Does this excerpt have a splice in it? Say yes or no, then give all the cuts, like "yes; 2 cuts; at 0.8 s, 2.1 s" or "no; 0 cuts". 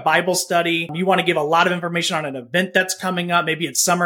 yes; 1 cut; at 0.9 s